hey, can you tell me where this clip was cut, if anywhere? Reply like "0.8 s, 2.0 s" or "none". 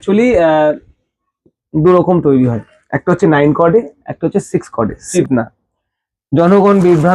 5.1 s

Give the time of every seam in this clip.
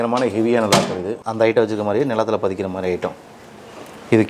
1.2 s

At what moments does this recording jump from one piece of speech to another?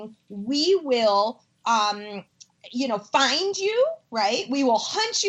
none

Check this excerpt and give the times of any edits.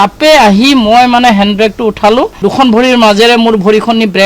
2.4 s

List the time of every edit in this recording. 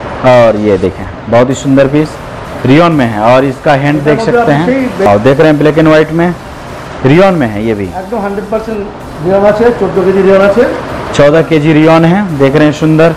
5.1 s

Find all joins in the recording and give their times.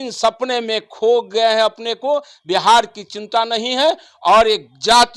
none

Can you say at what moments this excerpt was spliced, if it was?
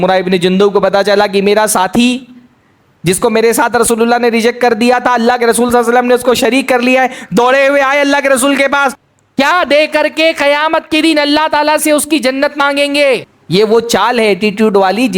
9.0 s, 13.3 s

